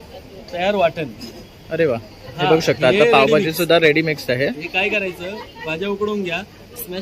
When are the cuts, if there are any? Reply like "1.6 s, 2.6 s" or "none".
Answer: none